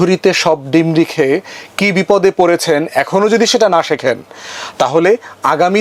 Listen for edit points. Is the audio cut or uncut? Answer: uncut